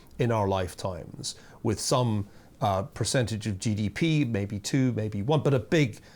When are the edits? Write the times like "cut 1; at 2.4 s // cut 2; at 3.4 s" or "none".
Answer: none